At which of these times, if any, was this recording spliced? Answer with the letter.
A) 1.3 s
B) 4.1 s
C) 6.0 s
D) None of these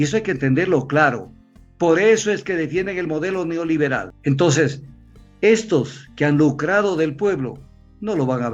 B